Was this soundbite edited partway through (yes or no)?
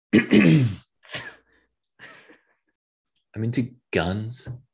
no